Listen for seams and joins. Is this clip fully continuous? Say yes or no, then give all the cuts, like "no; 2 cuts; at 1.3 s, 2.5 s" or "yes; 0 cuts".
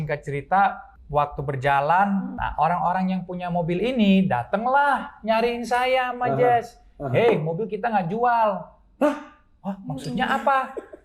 no; 2 cuts; at 0.9 s, 2.4 s